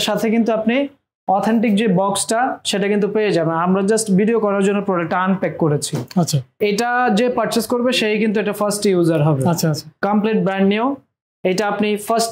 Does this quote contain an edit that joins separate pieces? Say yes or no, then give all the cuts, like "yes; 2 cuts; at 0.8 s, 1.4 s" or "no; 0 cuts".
yes; 2 cuts; at 6.6 s, 9.9 s